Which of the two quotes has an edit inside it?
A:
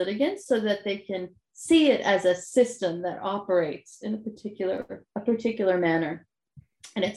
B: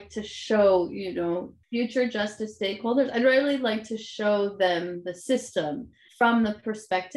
B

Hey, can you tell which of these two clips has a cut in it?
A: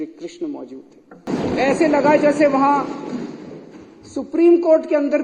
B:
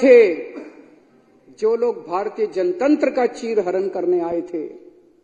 A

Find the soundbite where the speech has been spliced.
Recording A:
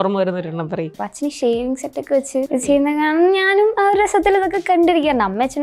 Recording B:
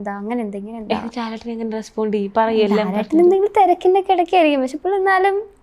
A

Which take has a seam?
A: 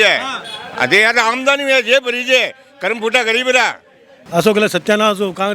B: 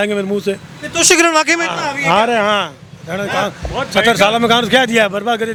A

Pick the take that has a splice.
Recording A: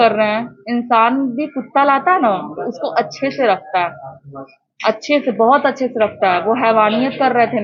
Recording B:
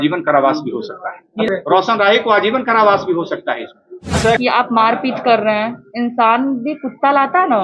B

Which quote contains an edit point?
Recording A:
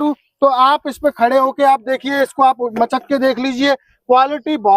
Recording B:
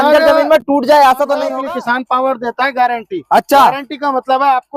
B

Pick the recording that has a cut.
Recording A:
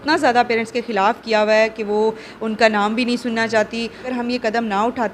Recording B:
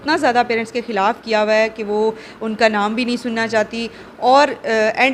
A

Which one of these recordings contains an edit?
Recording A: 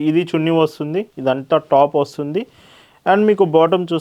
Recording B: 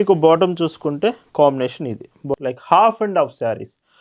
B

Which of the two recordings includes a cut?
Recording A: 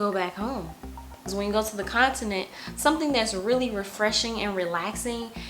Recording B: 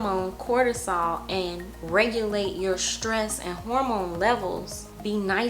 A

